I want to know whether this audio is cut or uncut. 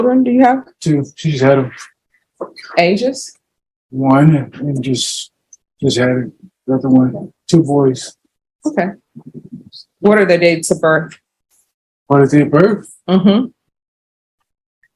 uncut